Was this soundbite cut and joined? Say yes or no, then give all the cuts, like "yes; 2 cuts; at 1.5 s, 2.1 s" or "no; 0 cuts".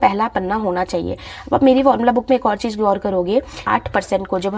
yes; 1 cut; at 3.6 s